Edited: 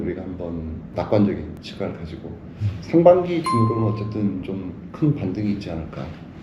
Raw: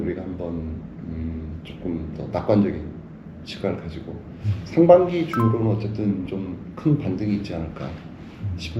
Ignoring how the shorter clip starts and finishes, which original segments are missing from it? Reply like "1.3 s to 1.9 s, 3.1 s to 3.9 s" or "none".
0.8 s to 2.2 s, 3.0 s to 3.5 s